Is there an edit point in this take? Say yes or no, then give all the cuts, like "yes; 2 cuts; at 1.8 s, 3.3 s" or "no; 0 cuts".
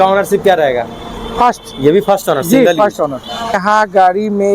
yes; 1 cut; at 3.6 s